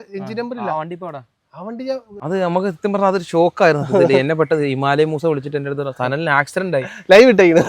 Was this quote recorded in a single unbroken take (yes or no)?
no